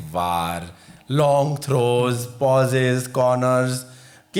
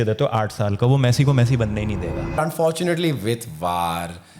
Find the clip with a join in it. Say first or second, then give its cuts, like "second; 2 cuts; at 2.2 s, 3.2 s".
second; 1 cut; at 2.4 s